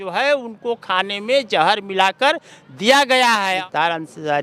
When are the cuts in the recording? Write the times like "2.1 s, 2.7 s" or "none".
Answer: none